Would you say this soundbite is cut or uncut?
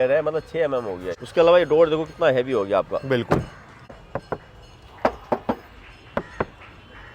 cut